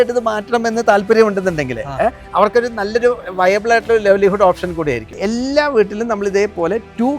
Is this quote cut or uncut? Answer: cut